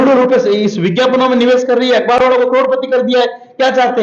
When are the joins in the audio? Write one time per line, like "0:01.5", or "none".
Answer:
none

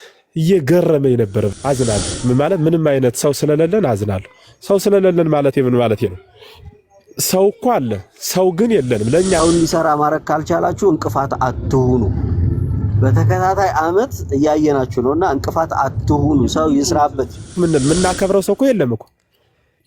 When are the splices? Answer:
0:01.6
0:09.4
0:17.5

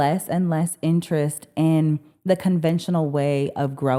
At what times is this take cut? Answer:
none

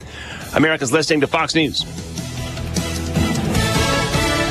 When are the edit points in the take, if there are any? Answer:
0:01.9

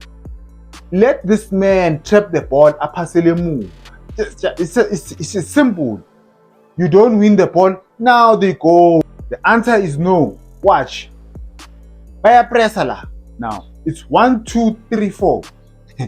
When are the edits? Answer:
0:09.0

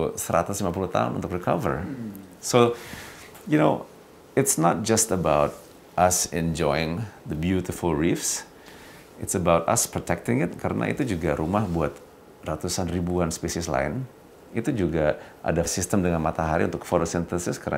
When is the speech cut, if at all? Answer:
0:15.7

